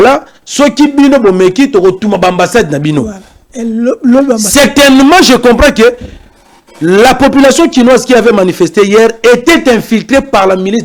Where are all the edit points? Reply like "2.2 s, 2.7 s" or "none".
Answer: none